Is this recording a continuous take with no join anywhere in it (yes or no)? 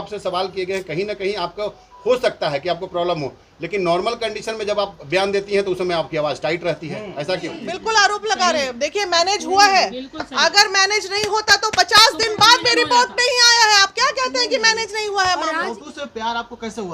no